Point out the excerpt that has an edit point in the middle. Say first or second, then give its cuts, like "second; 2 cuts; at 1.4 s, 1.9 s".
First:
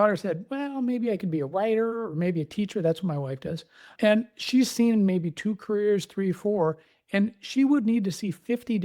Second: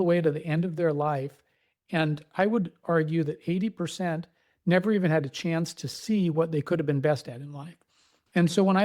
first; 1 cut; at 3.9 s